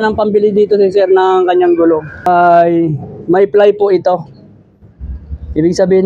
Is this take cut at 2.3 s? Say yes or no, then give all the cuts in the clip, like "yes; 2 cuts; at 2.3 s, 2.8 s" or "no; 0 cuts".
yes; 1 cut; at 2.3 s